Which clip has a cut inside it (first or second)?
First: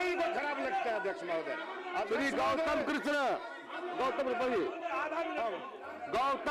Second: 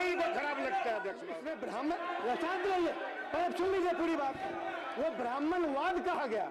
second